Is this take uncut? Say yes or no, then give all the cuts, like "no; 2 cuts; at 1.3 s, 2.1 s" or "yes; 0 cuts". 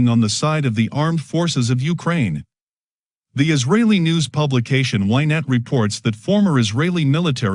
yes; 0 cuts